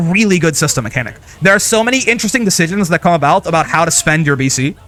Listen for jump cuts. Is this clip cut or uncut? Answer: uncut